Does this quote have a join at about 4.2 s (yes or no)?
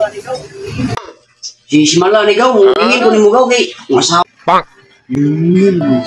yes